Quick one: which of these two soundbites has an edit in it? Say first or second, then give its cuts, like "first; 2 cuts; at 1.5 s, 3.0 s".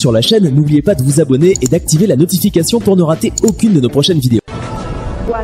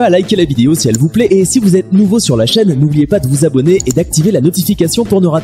first; 1 cut; at 4.4 s